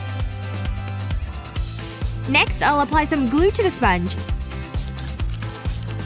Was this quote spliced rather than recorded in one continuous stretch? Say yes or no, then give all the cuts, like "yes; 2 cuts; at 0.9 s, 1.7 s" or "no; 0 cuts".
yes; 1 cut; at 1.4 s